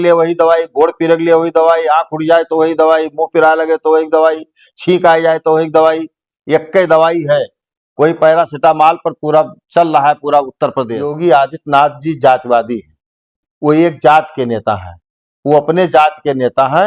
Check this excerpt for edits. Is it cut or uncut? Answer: cut